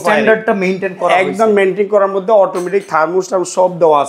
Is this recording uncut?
yes; 0 cuts

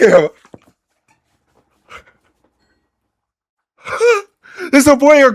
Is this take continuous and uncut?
yes; 0 cuts

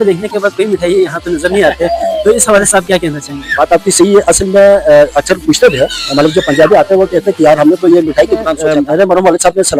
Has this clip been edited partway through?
yes; 1 cut; at 8.6 s

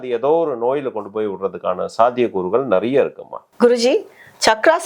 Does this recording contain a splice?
no; 0 cuts

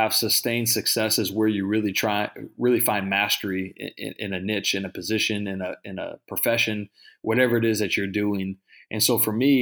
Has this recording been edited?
no; 0 cuts

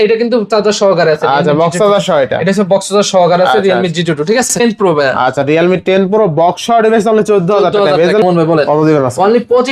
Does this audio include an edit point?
yes; 2 cuts; at 4.6 s, 8.2 s

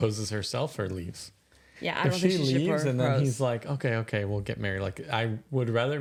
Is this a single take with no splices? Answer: yes; 0 cuts

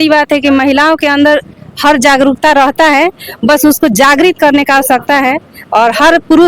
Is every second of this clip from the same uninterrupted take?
yes; 0 cuts

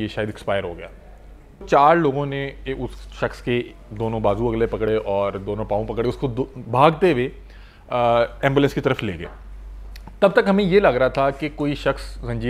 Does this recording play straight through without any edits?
no; 1 cut; at 1.7 s

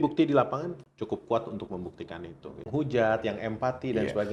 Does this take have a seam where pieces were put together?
yes; 2 cuts; at 0.9 s, 2.7 s

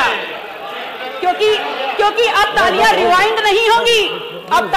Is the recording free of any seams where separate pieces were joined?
yes; 0 cuts

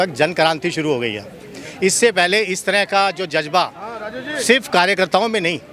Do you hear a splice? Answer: no; 0 cuts

